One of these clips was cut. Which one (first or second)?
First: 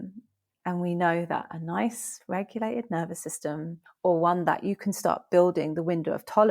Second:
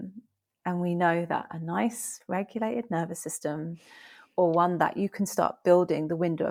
first